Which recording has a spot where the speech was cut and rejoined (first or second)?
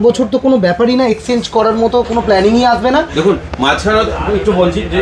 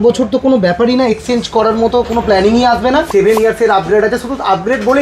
second